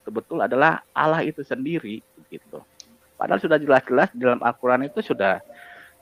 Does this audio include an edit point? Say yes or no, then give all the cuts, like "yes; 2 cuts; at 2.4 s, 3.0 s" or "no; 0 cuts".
no; 0 cuts